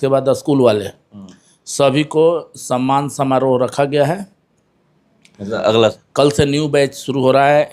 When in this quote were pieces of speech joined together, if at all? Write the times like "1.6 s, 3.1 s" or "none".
6.0 s